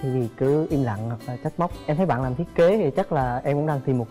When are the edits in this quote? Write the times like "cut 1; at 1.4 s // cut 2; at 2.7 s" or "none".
cut 1; at 1.8 s